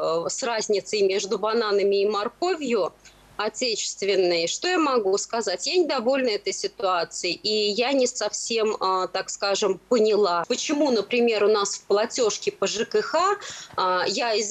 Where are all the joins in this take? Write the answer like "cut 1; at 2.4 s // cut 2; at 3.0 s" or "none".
cut 1; at 10.5 s